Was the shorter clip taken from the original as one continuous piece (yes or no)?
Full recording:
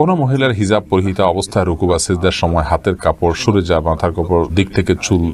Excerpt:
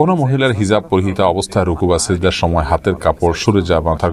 yes